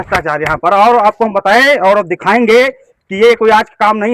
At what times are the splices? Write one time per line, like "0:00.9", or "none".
none

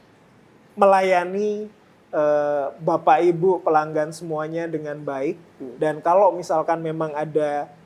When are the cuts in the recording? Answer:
none

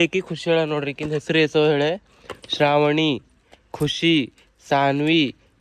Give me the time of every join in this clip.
none

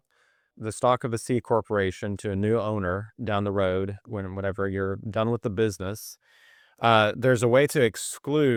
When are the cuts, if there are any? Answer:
none

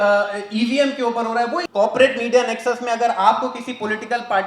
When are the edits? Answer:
0:01.7

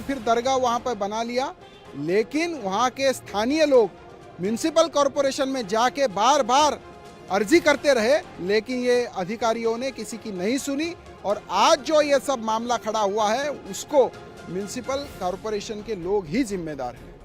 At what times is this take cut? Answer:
none

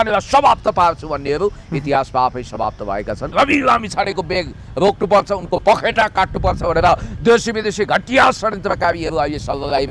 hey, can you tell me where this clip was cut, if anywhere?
0:03.3

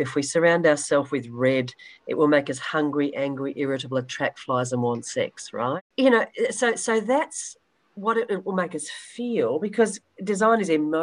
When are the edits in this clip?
0:05.7

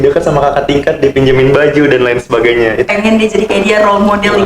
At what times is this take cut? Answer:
0:02.9

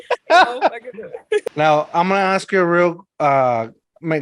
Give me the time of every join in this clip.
0:01.5

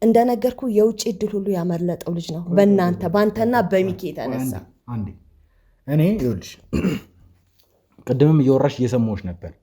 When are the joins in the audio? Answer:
none

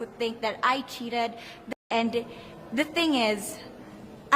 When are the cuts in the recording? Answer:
0:01.5

